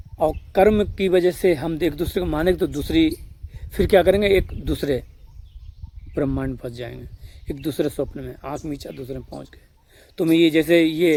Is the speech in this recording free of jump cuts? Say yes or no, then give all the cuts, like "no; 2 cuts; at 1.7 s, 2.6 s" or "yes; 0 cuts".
yes; 0 cuts